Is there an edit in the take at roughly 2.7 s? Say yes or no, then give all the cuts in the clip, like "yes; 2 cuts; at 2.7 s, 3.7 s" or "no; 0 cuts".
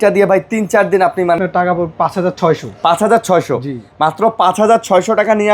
no; 1 cut; at 1.4 s